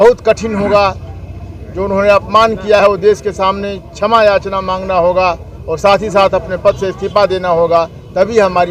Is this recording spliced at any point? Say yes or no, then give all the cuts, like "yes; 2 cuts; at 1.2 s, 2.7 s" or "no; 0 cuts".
no; 0 cuts